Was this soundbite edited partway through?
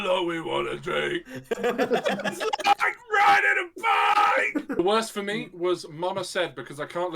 yes; 1 cut; at 4.8 s

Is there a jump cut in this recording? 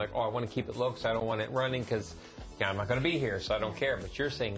no; 0 cuts

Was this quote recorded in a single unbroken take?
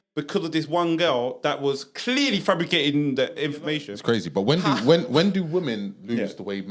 no; 1 cut; at 3.9 s

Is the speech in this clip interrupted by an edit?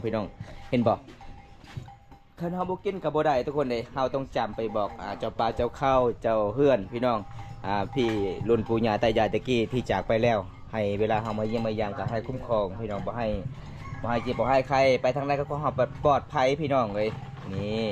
no; 0 cuts

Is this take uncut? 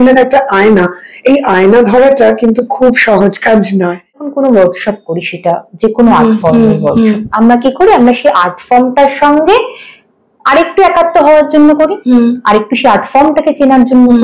no; 1 cut; at 4.3 s

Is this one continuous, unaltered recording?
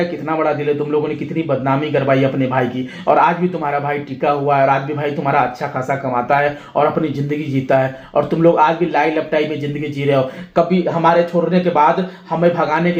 yes; 0 cuts

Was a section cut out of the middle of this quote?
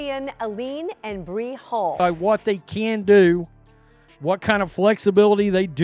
yes; 1 cut; at 1.9 s

